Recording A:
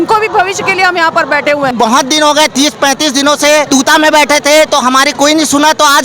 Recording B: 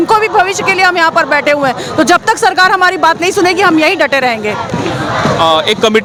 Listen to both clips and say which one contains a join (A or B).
A